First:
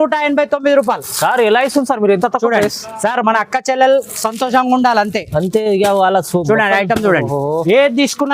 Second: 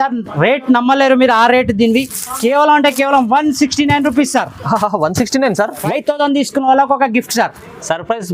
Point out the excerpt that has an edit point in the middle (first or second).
second